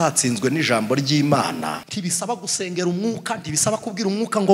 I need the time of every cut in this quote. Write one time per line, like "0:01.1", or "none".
0:01.9